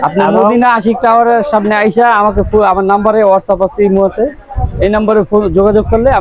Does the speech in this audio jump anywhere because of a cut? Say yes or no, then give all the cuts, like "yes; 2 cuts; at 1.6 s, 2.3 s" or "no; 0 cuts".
no; 0 cuts